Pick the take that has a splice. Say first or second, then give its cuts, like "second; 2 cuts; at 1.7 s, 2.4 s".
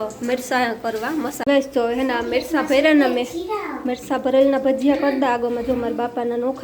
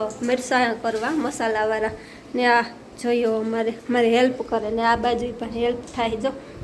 first; 1 cut; at 1.4 s